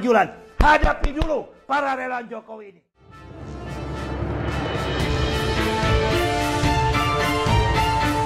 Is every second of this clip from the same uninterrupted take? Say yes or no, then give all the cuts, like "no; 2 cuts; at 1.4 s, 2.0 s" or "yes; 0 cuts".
no; 1 cut; at 2.6 s